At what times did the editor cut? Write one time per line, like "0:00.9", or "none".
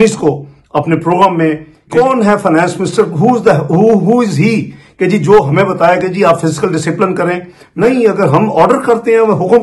0:01.7
0:07.6